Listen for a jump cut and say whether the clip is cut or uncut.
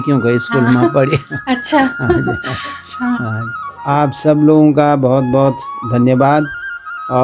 cut